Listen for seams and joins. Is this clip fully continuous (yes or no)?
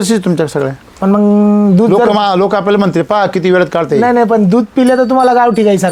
yes